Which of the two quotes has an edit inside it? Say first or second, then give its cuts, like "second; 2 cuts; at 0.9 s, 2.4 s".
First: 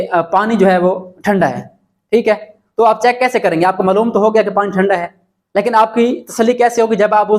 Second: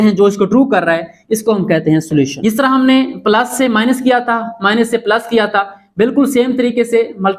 second; 1 cut; at 2.3 s